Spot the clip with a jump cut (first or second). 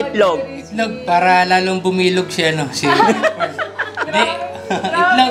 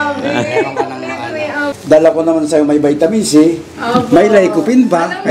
second